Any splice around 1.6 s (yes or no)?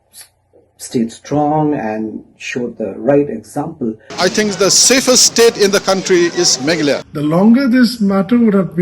no